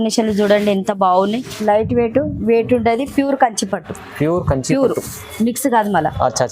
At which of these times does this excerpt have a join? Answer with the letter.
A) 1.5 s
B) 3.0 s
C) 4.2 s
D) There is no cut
A